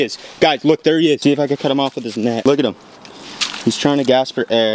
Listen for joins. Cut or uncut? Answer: uncut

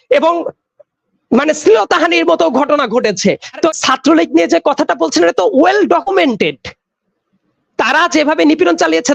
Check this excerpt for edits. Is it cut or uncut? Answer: cut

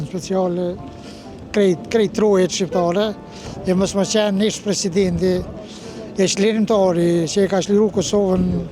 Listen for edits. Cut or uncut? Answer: cut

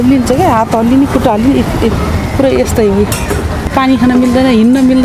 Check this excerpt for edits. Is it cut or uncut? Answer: cut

